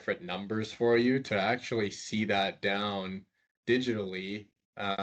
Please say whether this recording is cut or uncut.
uncut